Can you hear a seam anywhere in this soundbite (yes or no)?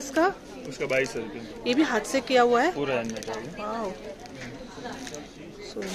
no